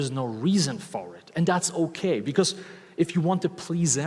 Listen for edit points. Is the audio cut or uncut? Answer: uncut